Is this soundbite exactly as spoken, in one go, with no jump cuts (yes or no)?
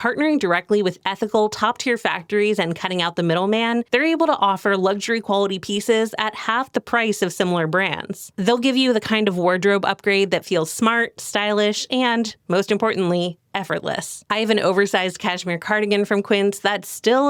yes